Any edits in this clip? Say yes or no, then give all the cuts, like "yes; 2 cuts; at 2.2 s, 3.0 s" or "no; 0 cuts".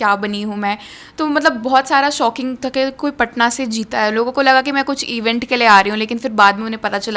no; 0 cuts